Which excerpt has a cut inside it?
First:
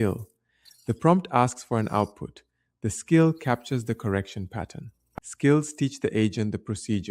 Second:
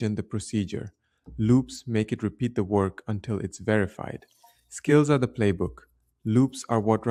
first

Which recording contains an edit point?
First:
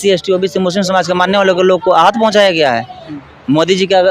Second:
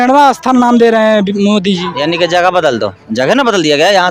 second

